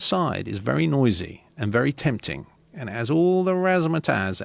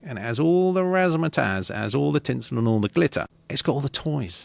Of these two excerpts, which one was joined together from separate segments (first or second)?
second